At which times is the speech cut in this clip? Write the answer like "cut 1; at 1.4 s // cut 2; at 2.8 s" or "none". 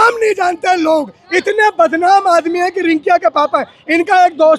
none